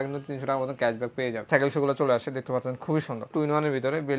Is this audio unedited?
no; 2 cuts; at 1.5 s, 3.3 s

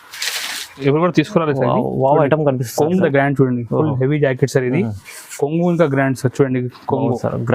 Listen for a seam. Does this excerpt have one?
yes; 1 cut; at 3.0 s

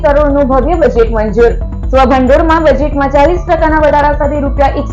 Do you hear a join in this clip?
no; 0 cuts

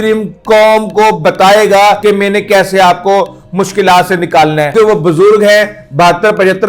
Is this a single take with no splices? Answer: no; 2 cuts; at 2.0 s, 4.7 s

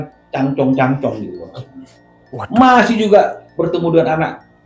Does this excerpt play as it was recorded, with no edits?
yes; 0 cuts

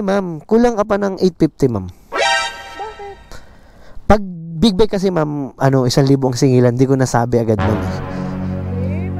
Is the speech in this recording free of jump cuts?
no; 1 cut; at 7.7 s

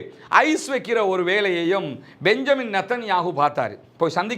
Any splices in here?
no; 0 cuts

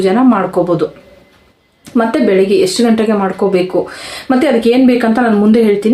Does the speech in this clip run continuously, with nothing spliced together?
yes; 0 cuts

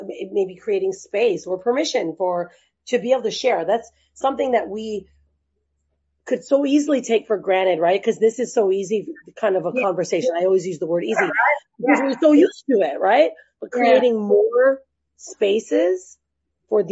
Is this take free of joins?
yes; 0 cuts

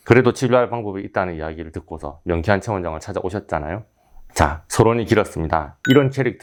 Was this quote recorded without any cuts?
yes; 0 cuts

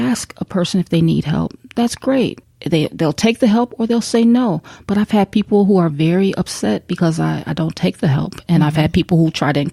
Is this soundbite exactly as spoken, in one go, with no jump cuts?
no; 1 cut; at 2.5 s

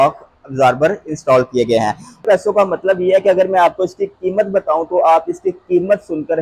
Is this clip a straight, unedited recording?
no; 1 cut; at 2.2 s

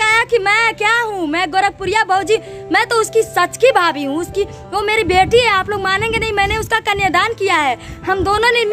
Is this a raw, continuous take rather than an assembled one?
yes; 0 cuts

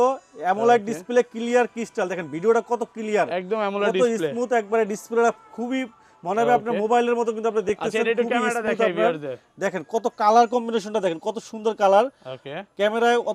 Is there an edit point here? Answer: no; 0 cuts

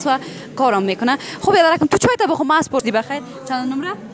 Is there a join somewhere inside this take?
yes; 1 cut; at 2.8 s

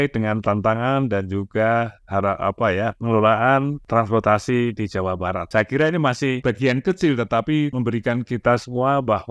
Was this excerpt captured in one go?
no; 4 cuts; at 3.8 s, 5.4 s, 6.4 s, 7.7 s

